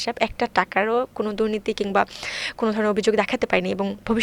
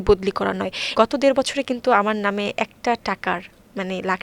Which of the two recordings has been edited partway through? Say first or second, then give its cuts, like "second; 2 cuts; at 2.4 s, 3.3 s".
second; 1 cut; at 0.9 s